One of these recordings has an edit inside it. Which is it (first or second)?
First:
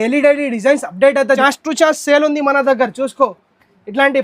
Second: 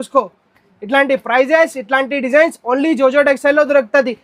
first